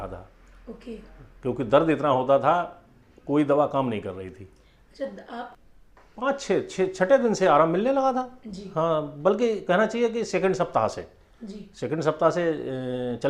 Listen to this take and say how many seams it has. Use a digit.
1